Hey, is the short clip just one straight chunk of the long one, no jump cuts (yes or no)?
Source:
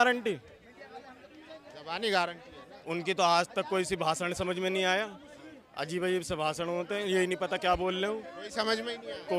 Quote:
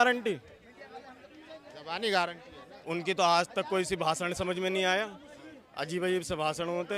yes